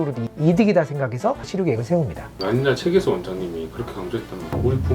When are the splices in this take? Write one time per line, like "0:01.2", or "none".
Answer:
0:01.5
0:02.3